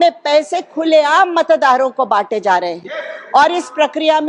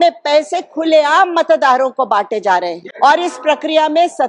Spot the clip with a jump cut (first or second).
second